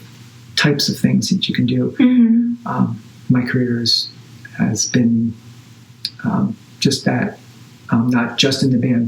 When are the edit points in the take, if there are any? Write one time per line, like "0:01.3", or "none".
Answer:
none

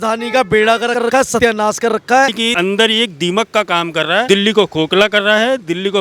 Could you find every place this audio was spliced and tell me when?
0:01.2
0:02.4
0:04.3

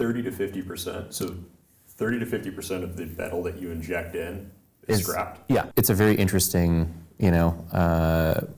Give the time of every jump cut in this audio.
0:05.7

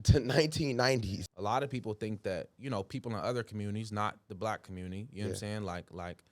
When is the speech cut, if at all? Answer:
0:01.2

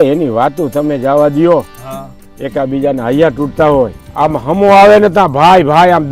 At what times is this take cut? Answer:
0:04.0

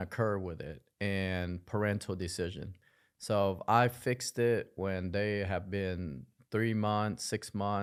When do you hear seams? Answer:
none

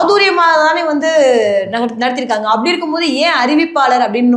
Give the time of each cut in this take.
none

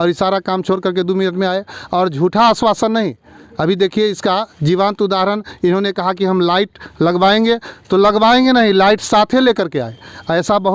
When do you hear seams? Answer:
none

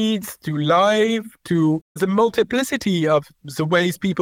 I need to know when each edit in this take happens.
0:02.0

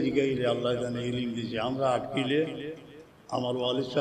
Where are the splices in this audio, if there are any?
none

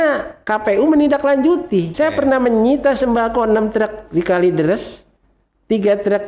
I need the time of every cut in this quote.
0:01.9

